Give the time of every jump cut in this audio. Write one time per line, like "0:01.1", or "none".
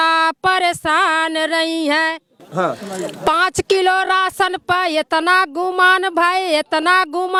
none